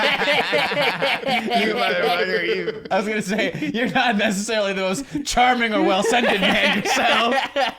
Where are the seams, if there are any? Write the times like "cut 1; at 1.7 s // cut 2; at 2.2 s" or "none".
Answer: cut 1; at 2.9 s